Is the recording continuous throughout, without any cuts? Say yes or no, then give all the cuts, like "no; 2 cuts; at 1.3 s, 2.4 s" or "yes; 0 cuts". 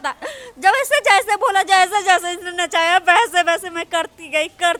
yes; 0 cuts